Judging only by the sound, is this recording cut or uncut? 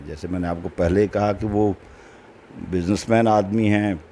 uncut